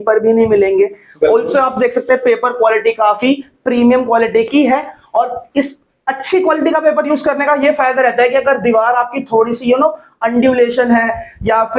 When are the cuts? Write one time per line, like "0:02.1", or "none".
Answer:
none